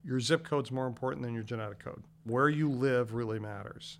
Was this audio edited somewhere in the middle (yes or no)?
yes